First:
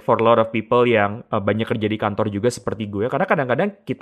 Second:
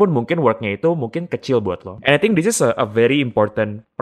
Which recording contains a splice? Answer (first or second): second